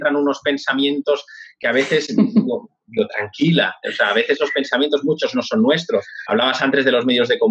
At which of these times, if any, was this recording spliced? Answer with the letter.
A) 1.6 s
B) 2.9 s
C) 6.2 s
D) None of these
C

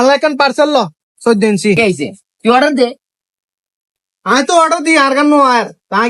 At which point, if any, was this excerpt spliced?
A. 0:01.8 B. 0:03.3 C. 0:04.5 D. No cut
A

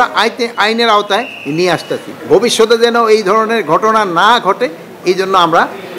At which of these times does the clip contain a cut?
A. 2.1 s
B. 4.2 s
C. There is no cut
A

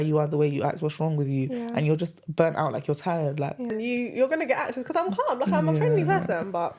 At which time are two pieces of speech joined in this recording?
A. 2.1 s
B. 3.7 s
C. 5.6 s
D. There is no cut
B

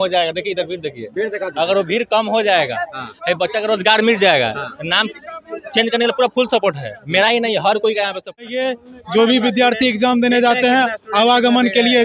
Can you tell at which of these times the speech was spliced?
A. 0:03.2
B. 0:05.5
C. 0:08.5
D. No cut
C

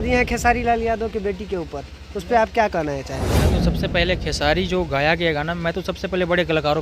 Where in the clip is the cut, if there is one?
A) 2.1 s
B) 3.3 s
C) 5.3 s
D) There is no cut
B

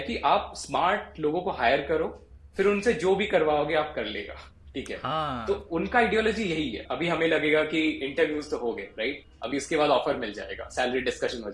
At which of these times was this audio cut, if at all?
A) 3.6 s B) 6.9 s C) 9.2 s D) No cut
B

